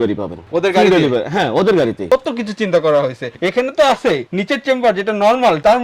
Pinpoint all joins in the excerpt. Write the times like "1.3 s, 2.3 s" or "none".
2.1 s